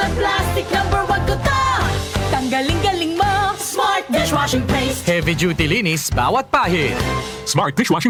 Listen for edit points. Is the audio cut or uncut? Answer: uncut